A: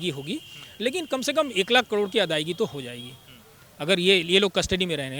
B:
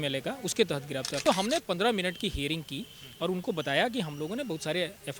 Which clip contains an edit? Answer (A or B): B